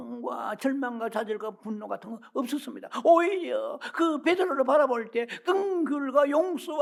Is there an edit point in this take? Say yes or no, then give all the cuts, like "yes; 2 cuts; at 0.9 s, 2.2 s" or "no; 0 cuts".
no; 0 cuts